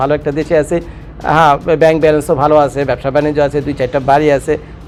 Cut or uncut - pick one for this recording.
uncut